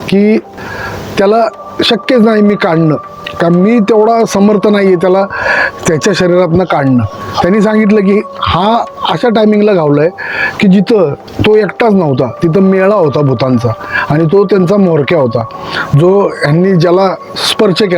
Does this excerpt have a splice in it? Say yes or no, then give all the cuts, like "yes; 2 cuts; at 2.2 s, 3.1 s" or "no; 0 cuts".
no; 0 cuts